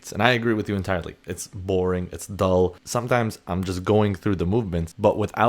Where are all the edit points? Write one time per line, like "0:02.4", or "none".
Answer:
0:02.8